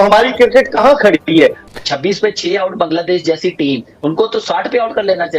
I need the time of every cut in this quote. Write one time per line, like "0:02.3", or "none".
0:01.6